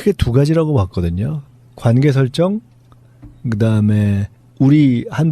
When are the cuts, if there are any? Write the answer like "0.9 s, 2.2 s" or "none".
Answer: 2.3 s